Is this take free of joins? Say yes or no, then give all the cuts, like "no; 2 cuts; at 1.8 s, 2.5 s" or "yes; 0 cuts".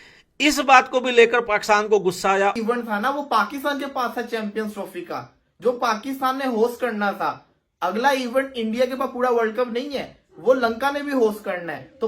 no; 1 cut; at 2.6 s